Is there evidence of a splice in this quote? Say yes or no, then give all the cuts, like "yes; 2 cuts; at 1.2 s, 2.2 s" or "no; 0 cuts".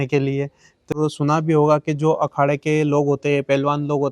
yes; 1 cut; at 0.9 s